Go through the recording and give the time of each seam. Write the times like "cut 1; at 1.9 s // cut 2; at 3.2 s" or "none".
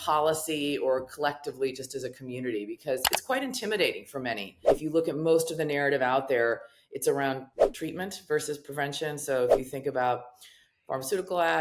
cut 1; at 4.7 s // cut 2; at 7.6 s

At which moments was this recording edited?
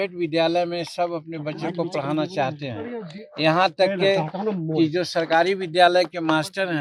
none

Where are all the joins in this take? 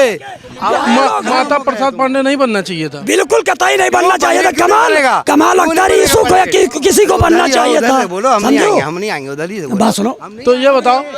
none

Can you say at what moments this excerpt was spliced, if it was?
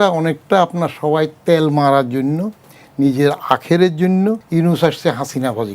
cut 1; at 4.4 s

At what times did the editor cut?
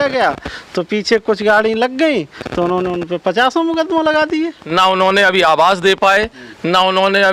cut 1; at 4.6 s

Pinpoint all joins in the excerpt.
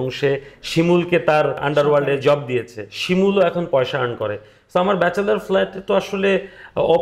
cut 1; at 1.6 s

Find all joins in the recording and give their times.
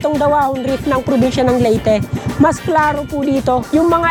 none

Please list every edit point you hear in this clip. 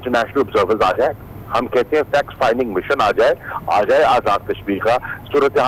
none

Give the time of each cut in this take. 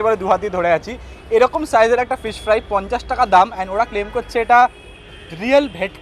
none

